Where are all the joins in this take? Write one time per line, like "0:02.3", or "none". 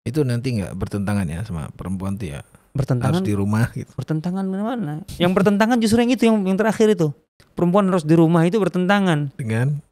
none